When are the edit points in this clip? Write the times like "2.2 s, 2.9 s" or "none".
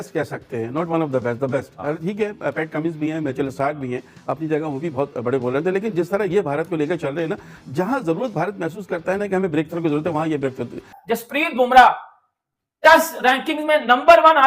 10.9 s